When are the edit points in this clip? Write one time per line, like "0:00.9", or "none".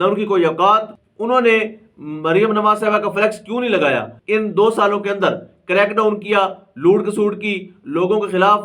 0:01.0
0:04.1

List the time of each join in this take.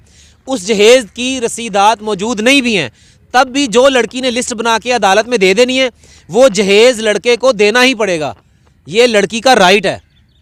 none

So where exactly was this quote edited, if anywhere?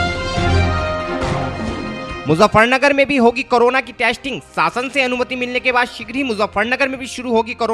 0:01.6

